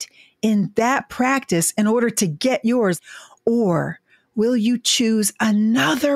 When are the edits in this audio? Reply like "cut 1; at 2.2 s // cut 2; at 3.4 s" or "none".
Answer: cut 1; at 3.0 s